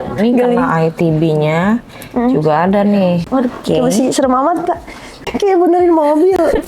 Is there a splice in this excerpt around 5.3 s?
yes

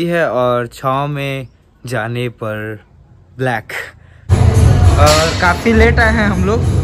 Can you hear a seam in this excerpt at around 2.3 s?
no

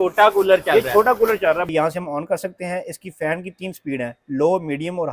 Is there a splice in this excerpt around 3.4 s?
no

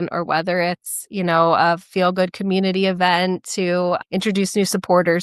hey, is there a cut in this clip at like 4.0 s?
yes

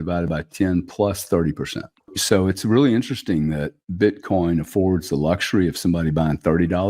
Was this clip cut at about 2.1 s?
yes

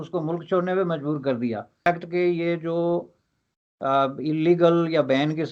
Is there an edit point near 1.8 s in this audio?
yes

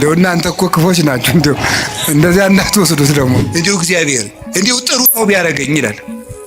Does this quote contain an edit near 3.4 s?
yes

